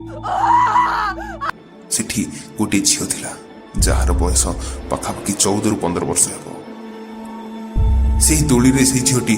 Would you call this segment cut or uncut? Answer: cut